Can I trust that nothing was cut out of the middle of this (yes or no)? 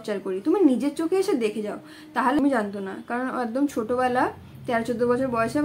no